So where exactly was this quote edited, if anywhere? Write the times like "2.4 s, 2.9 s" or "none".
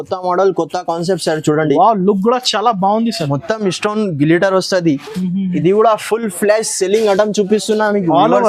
none